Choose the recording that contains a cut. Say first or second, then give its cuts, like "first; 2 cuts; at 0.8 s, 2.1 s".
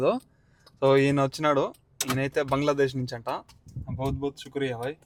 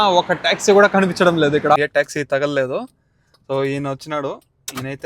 second; 1 cut; at 1.8 s